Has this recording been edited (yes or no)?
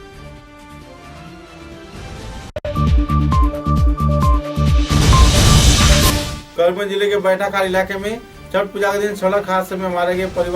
yes